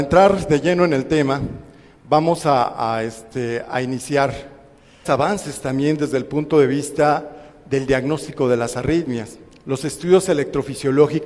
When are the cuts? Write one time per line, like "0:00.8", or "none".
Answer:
none